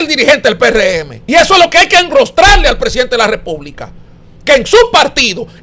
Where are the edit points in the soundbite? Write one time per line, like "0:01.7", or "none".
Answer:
0:01.1